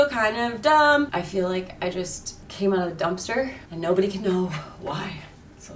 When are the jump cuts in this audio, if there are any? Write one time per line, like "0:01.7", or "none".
0:01.1

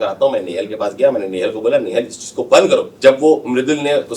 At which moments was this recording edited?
0:02.9

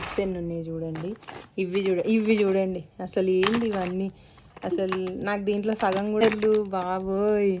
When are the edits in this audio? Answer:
0:06.2

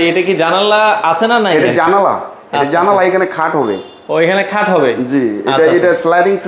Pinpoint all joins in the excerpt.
none

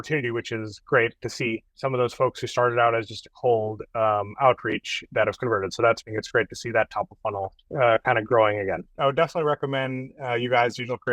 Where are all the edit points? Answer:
0:01.7
0:06.0
0:08.9

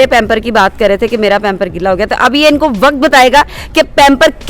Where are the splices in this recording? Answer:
none

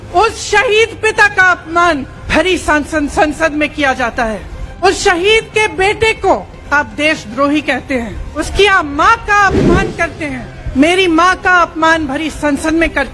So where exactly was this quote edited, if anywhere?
0:02.2
0:04.8
0:06.6
0:08.3
0:10.5

